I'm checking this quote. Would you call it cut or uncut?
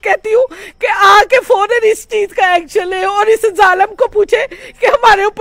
uncut